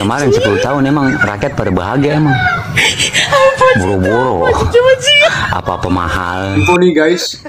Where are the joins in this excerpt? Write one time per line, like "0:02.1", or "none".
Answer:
0:06.5